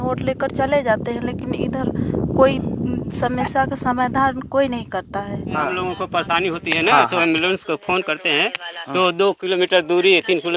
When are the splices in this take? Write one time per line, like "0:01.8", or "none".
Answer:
0:05.6